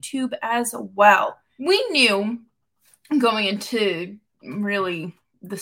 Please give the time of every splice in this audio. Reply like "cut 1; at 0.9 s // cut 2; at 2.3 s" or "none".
cut 1; at 1.5 s